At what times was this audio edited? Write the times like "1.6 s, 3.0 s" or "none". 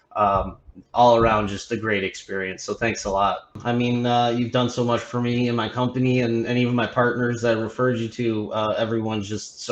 3.6 s